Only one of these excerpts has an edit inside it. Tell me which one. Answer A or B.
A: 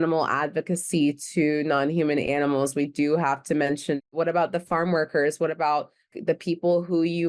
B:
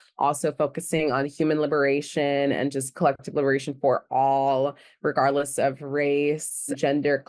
A